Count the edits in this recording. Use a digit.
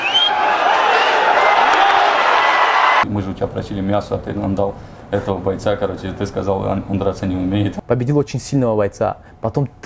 2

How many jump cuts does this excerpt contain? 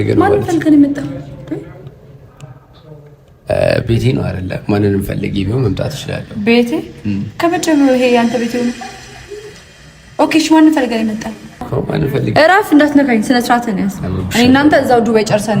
1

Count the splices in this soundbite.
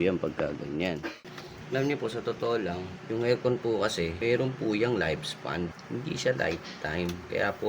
4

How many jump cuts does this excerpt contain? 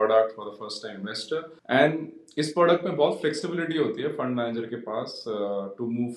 1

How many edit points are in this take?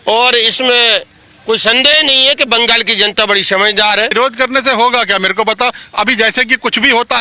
1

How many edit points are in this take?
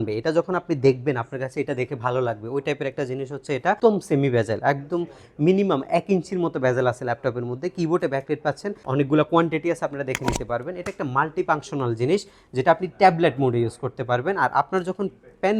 2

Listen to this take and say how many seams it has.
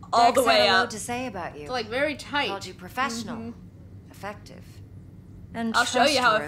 0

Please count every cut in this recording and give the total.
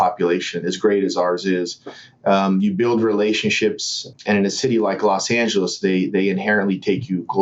1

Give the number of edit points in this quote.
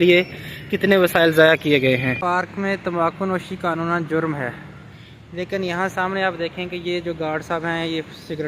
1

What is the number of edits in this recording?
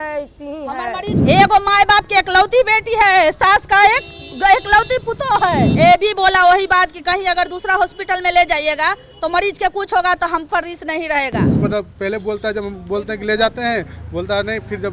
3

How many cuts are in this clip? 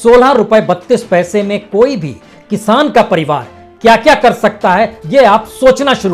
0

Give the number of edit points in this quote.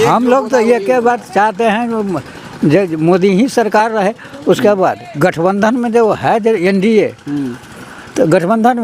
0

